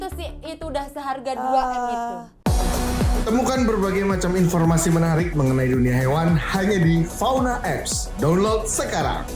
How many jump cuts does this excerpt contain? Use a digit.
1